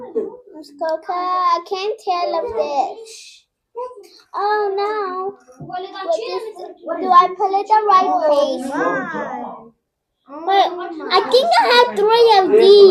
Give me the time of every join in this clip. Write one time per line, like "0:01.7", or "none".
none